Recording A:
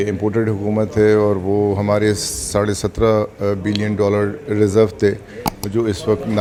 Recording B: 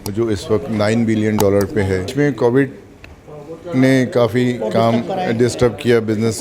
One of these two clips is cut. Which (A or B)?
B